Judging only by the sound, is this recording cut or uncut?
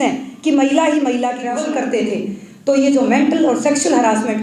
cut